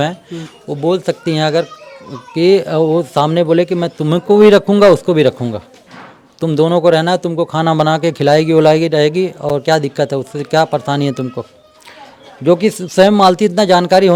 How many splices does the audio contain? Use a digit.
0